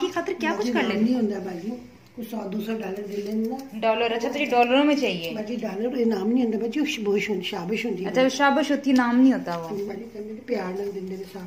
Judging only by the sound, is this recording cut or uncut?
uncut